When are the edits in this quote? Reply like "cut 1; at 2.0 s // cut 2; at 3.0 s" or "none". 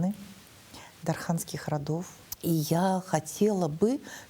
cut 1; at 2.2 s